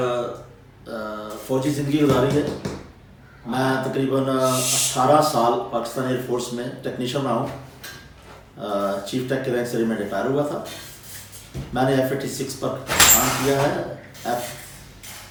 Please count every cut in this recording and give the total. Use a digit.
0